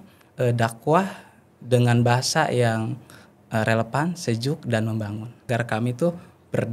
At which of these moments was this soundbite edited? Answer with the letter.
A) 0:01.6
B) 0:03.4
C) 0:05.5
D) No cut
C